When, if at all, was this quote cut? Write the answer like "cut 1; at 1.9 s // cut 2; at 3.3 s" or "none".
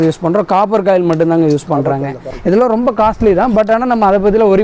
cut 1; at 2.3 s